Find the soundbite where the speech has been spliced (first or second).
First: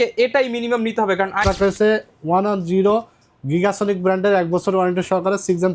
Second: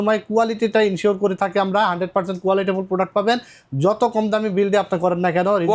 first